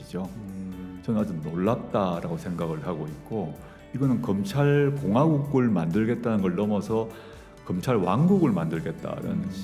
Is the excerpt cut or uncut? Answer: uncut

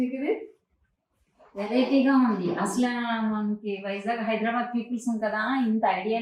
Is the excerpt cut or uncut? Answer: uncut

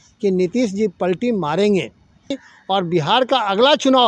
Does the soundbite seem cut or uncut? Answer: cut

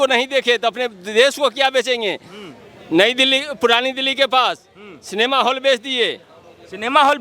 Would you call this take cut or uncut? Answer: uncut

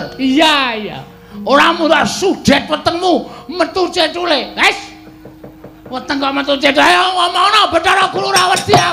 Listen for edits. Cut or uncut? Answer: uncut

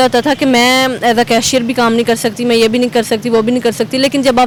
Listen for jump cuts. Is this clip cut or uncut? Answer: uncut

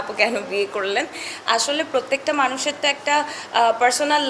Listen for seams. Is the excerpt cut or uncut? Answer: uncut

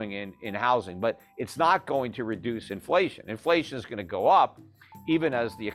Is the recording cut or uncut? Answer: uncut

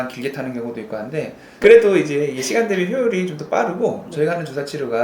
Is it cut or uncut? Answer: cut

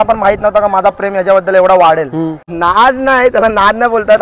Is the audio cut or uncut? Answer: cut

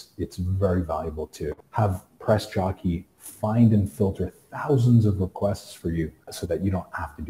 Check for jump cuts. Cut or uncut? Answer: cut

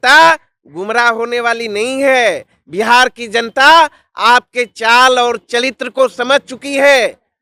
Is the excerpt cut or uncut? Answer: uncut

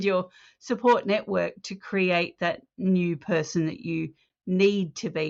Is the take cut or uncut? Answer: uncut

